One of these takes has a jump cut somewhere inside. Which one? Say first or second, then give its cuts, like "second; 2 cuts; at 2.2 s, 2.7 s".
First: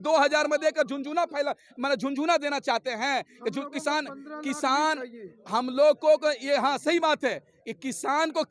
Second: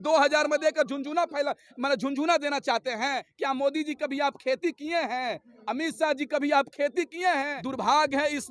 second; 2 cuts; at 3.3 s, 7.6 s